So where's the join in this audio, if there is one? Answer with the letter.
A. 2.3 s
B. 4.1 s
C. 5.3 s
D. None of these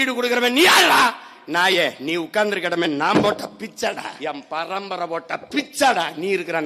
B